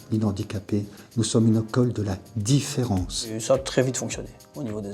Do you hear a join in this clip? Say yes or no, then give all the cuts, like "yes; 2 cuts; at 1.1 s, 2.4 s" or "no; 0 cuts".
yes; 1 cut; at 3.4 s